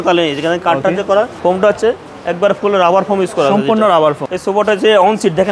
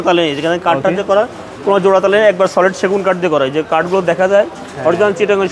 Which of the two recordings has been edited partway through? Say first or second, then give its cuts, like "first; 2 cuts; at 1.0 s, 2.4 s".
first; 2 cuts; at 1.3 s, 4.3 s